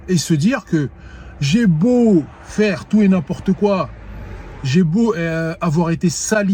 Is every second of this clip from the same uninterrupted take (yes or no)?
yes